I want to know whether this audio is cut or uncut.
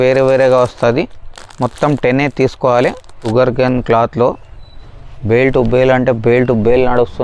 cut